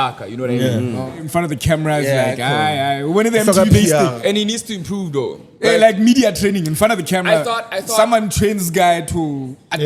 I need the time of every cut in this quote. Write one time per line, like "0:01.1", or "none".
0:01.2

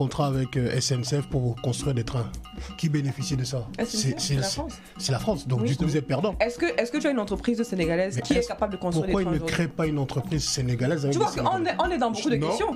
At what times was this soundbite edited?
none

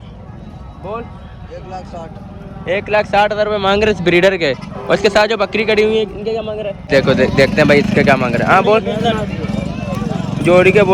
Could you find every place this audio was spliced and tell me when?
0:06.9

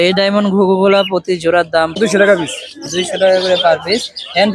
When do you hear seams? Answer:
0:02.0

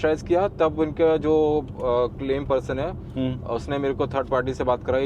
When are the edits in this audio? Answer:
none

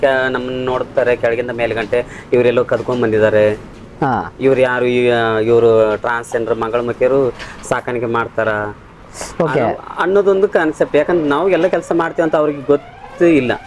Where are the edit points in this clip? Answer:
none

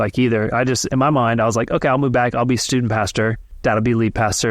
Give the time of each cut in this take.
0:00.9
0:03.5

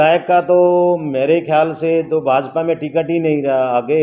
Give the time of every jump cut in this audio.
none

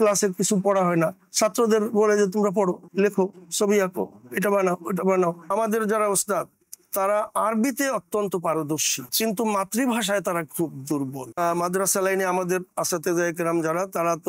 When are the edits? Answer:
0:05.4
0:11.4

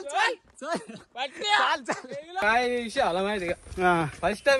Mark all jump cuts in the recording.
0:02.4

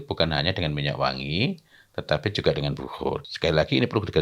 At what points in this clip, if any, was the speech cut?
0:03.2

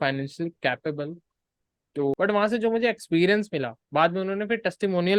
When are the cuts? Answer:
0:02.1

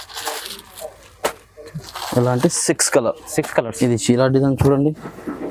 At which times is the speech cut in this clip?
0:03.7

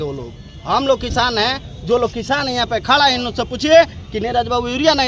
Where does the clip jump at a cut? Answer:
none

